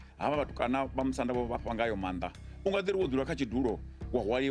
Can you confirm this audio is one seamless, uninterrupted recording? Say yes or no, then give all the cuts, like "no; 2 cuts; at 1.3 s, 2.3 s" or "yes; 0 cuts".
yes; 0 cuts